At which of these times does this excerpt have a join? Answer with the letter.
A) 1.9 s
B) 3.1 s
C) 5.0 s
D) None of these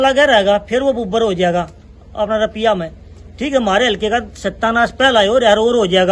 D